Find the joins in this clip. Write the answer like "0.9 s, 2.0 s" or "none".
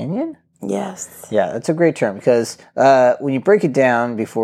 2.6 s